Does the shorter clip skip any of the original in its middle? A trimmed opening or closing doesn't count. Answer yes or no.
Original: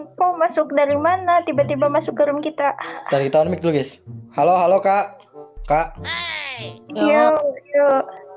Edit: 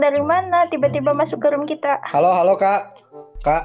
yes